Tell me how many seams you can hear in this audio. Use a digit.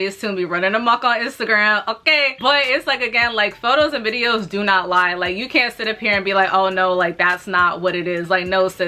0